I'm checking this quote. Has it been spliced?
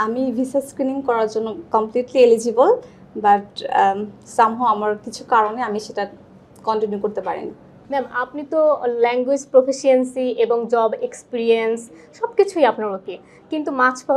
no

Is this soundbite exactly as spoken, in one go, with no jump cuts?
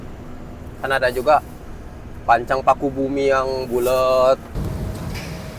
no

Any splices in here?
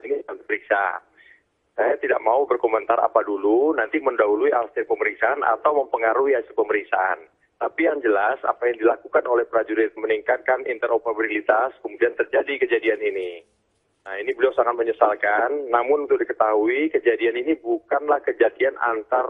no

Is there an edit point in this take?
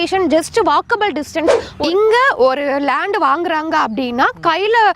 yes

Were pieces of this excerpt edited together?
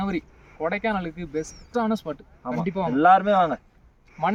no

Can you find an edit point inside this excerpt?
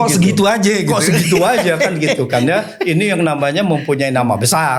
no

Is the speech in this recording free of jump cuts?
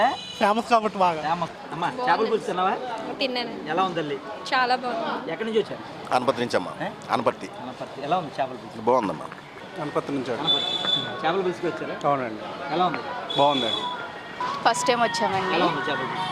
no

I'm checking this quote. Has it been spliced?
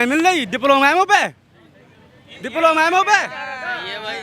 no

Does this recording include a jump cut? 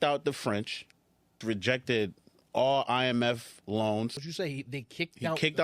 yes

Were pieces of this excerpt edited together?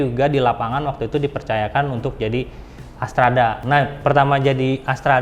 yes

